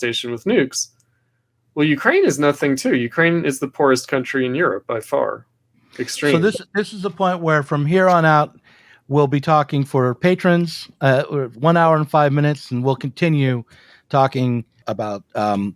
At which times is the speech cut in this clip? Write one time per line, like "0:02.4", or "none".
0:14.8